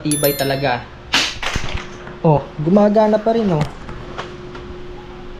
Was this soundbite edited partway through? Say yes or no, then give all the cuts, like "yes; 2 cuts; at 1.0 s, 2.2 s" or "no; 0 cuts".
no; 0 cuts